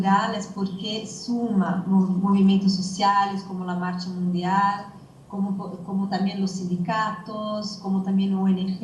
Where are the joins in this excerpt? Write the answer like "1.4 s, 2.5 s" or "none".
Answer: none